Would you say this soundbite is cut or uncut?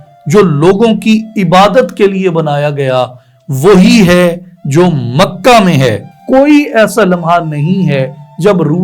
cut